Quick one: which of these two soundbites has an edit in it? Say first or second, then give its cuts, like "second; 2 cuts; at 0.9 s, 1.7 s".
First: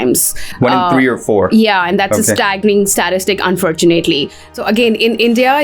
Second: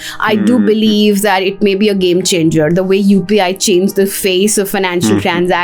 first; 1 cut; at 4.5 s